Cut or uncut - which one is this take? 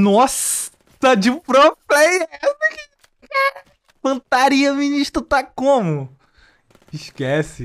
uncut